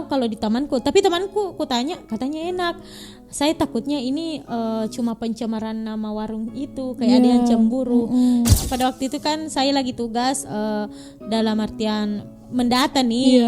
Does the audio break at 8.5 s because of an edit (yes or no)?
yes